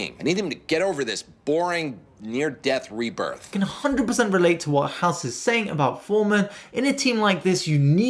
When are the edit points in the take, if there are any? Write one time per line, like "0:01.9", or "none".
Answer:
0:03.5